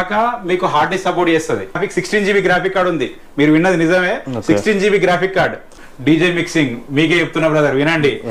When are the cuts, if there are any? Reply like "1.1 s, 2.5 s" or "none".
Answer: 1.8 s, 5.8 s